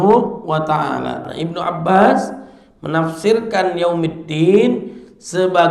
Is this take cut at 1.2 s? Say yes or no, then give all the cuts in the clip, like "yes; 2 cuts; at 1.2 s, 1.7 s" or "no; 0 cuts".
yes; 1 cut; at 1.2 s